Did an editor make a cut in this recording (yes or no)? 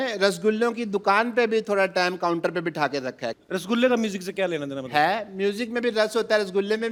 no